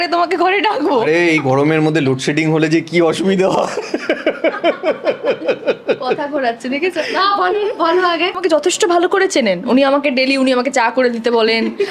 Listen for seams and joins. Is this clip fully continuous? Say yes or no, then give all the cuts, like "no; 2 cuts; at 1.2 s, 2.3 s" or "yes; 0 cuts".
no; 1 cut; at 8.3 s